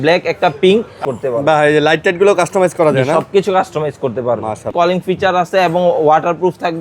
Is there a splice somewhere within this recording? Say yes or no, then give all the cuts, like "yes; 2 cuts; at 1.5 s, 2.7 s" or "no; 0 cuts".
yes; 2 cuts; at 1.0 s, 4.7 s